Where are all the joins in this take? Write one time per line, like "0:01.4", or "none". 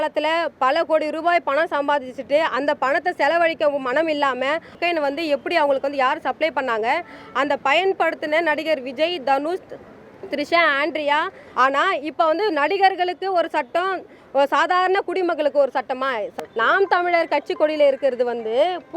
0:04.8
0:11.4
0:16.3